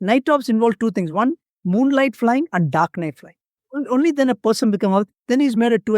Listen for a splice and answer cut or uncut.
cut